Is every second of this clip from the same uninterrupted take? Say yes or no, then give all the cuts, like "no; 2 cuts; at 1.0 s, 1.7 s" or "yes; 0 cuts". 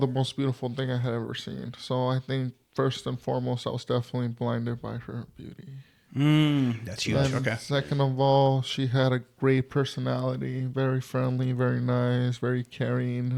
yes; 0 cuts